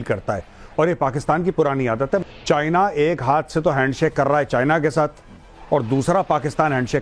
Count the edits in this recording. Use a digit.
1